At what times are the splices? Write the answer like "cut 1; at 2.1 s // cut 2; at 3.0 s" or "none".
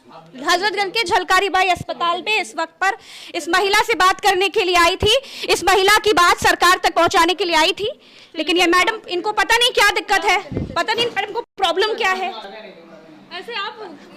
none